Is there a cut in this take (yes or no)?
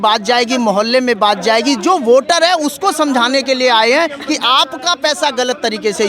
no